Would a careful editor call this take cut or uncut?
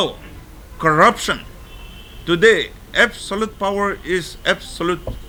uncut